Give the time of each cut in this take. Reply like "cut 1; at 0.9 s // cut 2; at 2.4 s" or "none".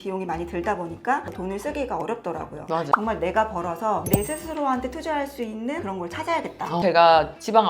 cut 1; at 1.3 s // cut 2; at 2.9 s // cut 3; at 6.8 s